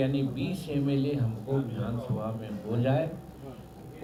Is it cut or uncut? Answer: uncut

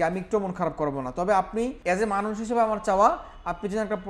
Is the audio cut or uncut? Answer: cut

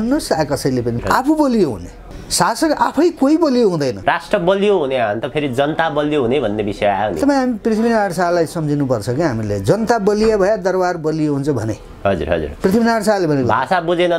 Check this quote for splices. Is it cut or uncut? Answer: cut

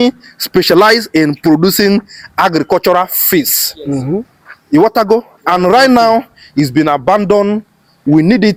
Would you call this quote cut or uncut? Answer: uncut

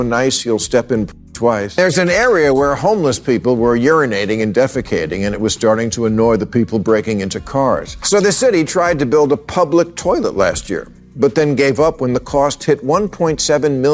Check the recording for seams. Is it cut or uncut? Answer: cut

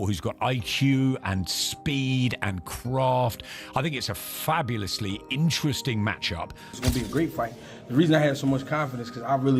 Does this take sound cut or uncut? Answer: cut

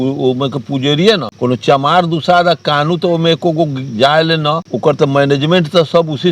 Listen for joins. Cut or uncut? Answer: cut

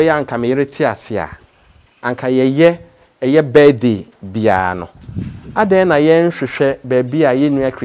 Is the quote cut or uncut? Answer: uncut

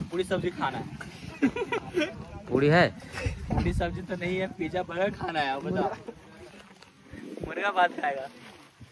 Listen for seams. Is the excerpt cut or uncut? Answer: uncut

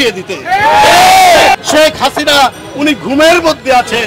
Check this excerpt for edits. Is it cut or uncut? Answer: cut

